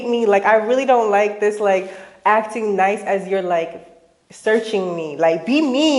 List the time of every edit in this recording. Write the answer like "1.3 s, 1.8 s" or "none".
none